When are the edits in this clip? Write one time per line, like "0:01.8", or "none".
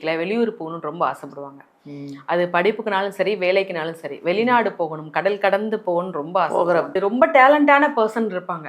0:07.0

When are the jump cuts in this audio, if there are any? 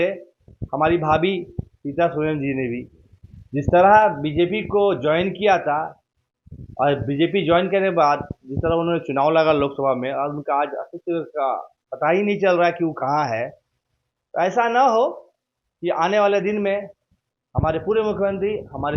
none

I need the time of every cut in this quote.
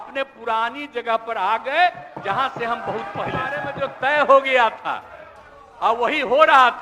0:03.8

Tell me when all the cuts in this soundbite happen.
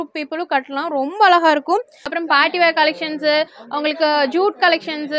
0:02.1

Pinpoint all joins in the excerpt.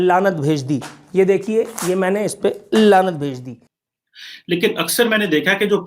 0:03.5

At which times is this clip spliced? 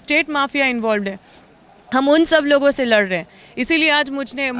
none

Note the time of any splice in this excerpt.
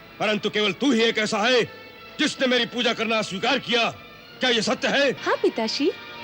0:05.2

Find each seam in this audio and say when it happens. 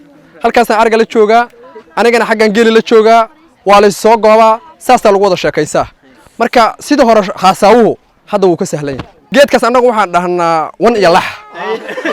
0:09.1

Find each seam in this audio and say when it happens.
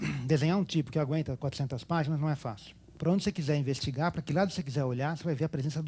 0:02.9

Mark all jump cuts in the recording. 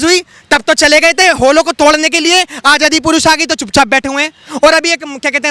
none

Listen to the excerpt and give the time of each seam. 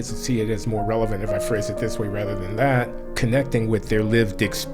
0:03.0

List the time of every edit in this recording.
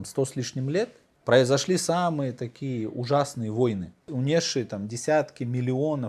0:01.1
0:04.0

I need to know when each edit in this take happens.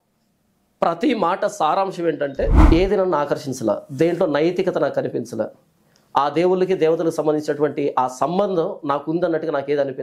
0:02.6

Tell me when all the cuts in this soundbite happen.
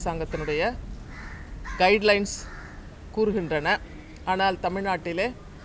none

